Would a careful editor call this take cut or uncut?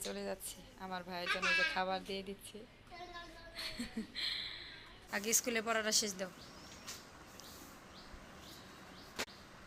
cut